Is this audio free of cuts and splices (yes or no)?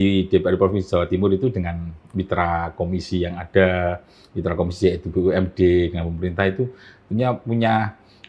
yes